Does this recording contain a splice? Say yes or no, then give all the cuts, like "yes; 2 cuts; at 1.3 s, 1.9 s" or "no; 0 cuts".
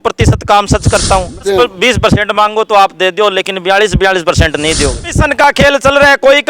yes; 2 cuts; at 1.4 s, 5.1 s